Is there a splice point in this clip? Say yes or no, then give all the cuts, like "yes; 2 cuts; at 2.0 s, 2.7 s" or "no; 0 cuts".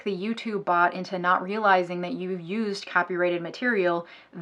no; 0 cuts